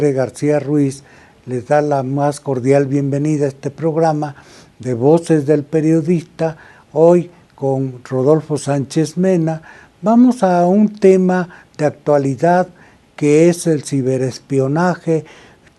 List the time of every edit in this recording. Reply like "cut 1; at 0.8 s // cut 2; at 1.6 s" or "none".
cut 1; at 12.4 s